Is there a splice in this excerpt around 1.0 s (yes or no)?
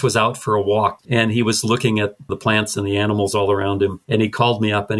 yes